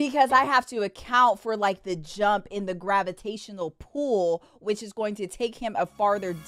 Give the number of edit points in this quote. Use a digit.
0